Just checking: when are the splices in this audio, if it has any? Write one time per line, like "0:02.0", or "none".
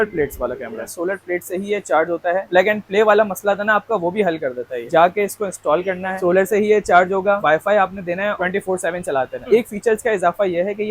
0:00.9
0:04.9
0:07.4
0:09.5